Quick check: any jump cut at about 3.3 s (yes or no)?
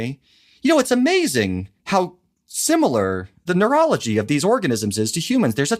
yes